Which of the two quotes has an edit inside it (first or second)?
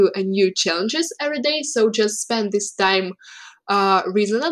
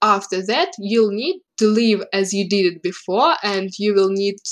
second